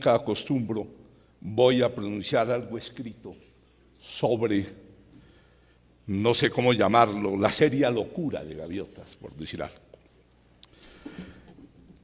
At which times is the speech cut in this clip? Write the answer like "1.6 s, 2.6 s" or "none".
none